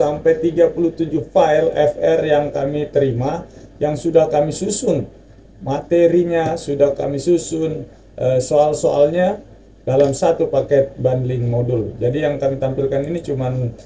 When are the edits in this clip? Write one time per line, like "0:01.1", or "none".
none